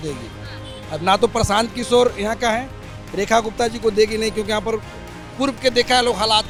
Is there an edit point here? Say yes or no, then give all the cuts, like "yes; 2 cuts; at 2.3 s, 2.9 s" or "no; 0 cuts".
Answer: no; 0 cuts